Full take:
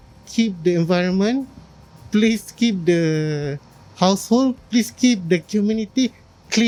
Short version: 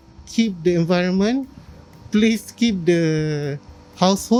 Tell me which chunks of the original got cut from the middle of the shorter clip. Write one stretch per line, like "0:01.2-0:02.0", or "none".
none